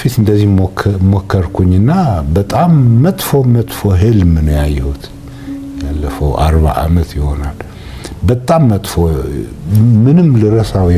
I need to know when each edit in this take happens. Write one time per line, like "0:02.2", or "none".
none